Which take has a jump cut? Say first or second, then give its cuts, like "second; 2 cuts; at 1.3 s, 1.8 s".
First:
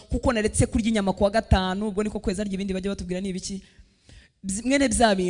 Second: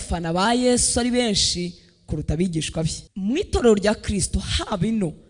second; 1 cut; at 3.0 s